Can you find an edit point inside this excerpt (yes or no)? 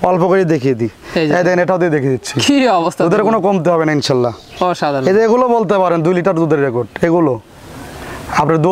no